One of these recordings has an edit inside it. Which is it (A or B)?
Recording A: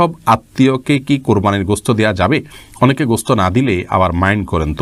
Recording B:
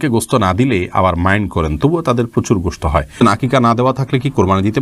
B